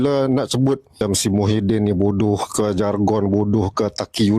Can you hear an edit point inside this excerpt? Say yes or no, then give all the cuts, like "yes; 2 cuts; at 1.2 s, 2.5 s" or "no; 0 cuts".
yes; 1 cut; at 1.0 s